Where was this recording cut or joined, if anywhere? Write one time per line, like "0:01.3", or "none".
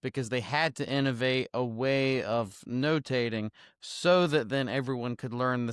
none

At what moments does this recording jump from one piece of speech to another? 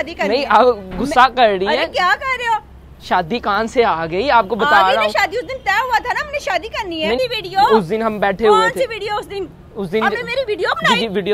0:07.2

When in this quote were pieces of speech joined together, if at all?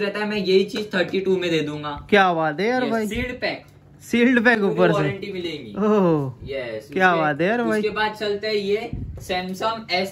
none

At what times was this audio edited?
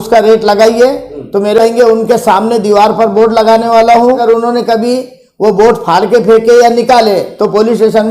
0:01.6
0:04.2

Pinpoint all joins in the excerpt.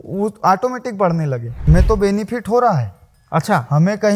0:01.6

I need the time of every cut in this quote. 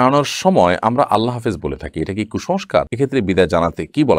0:02.9

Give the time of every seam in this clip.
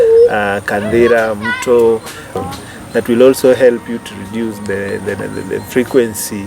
0:02.3

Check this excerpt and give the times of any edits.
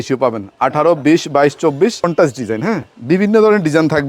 0:02.1

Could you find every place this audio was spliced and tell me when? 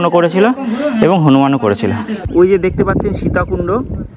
0:02.1

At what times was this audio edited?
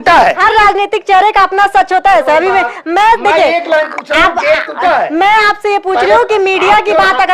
none

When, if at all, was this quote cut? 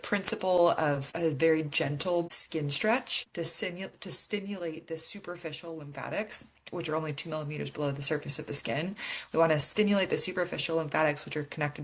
0:01.1
0:02.4
0:03.2

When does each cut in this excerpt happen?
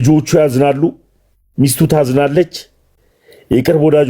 none

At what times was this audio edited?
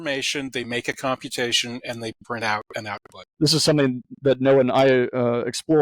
0:03.4

